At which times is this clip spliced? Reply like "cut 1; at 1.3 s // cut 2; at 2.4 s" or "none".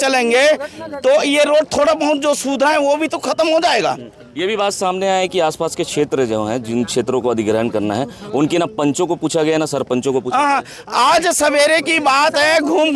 none